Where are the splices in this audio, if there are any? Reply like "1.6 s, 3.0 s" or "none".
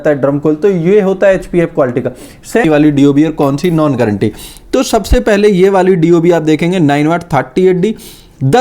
2.6 s